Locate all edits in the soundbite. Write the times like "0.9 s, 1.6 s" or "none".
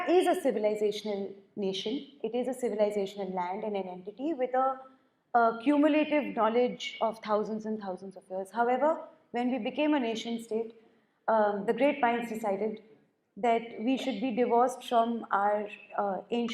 none